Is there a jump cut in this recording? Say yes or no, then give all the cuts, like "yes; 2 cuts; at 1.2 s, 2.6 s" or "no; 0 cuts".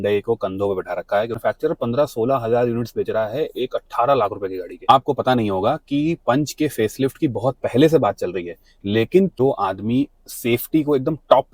yes; 3 cuts; at 1.4 s, 4.7 s, 9.3 s